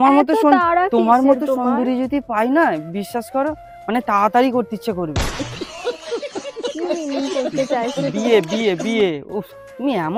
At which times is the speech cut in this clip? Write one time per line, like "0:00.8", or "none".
none